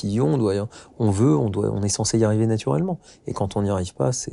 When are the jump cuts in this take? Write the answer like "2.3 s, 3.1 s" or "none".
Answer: none